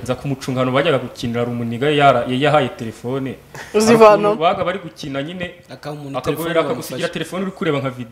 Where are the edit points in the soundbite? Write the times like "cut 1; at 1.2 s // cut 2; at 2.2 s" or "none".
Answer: none